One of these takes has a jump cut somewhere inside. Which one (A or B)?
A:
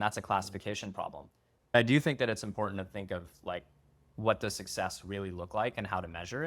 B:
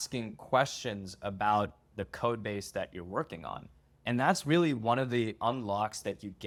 A